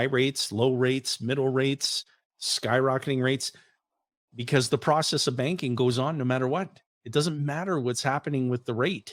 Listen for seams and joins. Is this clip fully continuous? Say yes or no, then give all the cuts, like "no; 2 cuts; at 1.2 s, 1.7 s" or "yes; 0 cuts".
yes; 0 cuts